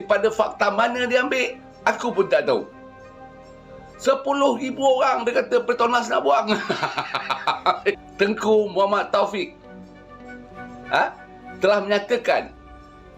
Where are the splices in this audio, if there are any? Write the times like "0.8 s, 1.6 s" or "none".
8.0 s

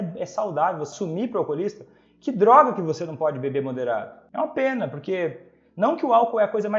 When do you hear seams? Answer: 0.9 s, 4.2 s

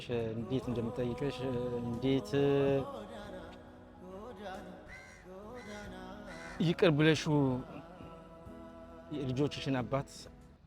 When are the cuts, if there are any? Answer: 2.8 s, 4.7 s, 6.5 s

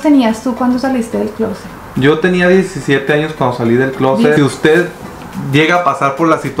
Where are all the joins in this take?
4.3 s

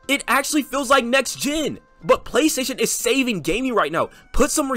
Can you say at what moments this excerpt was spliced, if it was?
1.9 s

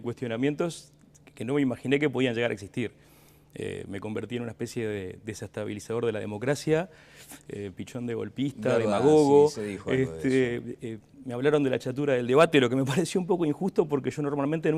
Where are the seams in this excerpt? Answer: 6.6 s

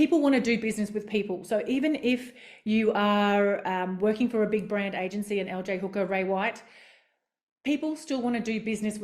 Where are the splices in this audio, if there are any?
none

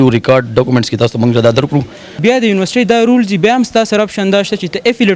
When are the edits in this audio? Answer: 2.2 s

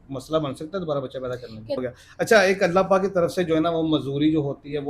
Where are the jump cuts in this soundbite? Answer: 1.8 s

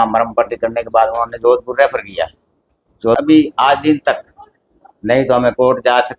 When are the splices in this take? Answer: 3.2 s

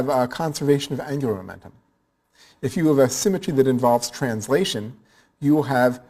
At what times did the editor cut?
5.0 s

